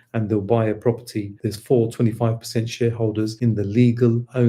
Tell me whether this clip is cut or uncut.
cut